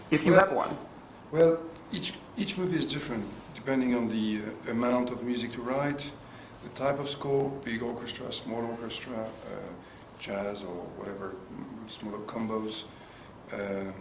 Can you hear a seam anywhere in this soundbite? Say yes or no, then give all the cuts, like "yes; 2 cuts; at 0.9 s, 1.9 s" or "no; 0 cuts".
yes; 1 cut; at 5.1 s